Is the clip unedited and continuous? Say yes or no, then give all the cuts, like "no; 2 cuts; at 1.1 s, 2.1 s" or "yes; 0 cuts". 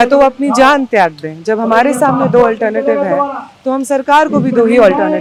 yes; 0 cuts